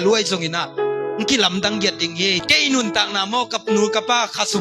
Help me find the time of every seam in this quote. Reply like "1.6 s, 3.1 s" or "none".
2.4 s